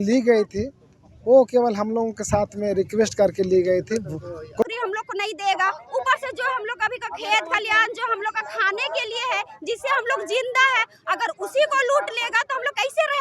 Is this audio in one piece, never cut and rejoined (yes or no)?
no